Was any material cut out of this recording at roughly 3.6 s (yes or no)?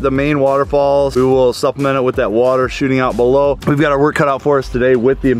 yes